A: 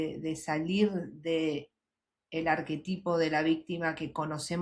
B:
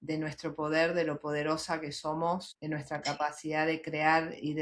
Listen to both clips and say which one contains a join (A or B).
B